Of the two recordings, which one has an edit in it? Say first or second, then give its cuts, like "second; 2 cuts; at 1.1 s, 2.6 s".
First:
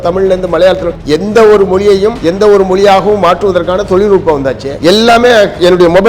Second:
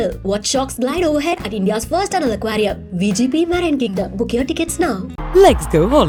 first; 3 cuts; at 0.9 s, 2.2 s, 4.7 s